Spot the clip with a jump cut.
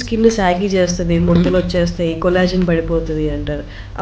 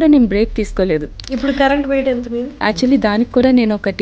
second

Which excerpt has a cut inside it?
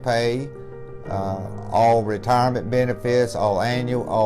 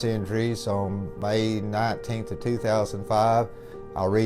second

